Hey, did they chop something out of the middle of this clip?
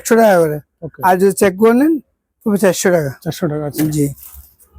no; 0 cuts

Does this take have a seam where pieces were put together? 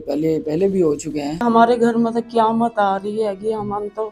yes; 1 cut; at 1.4 s

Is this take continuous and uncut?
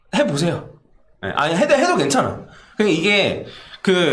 yes; 0 cuts

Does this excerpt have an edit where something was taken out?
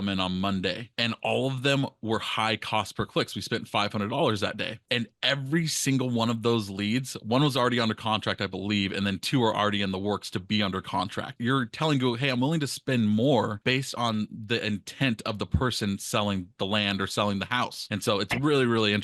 yes; 2 cuts; at 11.3 s, 13.6 s

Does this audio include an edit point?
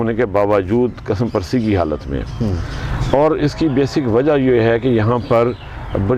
no; 0 cuts

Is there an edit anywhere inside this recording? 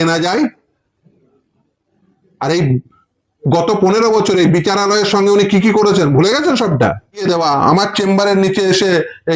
yes; 1 cut; at 7.2 s

